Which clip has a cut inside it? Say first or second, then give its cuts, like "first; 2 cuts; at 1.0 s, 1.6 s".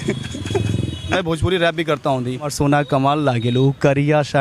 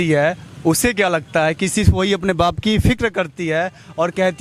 first; 2 cuts; at 1.1 s, 2.5 s